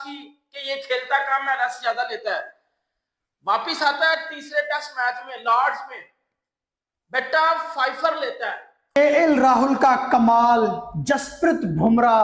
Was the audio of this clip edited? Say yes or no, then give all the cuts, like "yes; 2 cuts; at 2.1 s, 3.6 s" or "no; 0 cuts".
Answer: yes; 1 cut; at 9.0 s